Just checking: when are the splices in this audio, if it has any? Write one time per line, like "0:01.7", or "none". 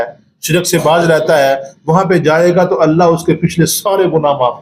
none